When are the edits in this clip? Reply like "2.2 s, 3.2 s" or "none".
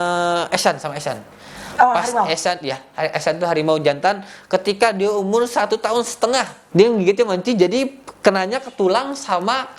6.6 s